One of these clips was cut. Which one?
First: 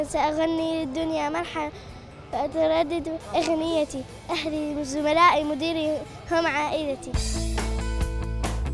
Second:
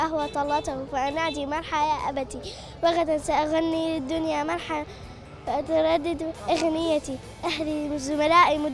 first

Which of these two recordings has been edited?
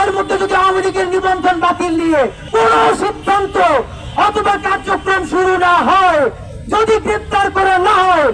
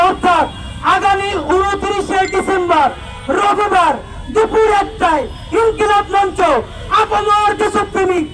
first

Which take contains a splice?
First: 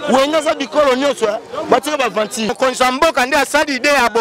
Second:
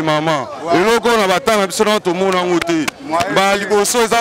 first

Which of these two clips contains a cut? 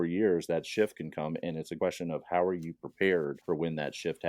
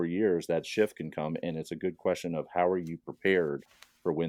first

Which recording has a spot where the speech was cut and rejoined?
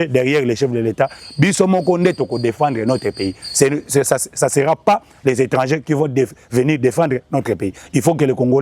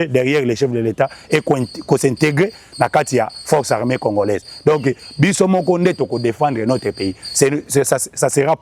first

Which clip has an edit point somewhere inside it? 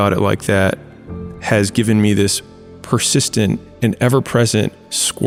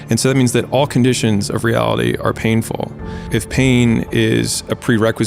second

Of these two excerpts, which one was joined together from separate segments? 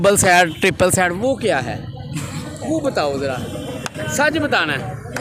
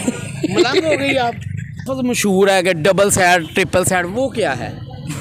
second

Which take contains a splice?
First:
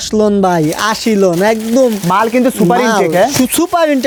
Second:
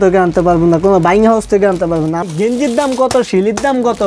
second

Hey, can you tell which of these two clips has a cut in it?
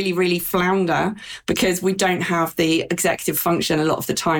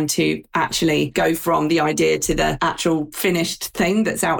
second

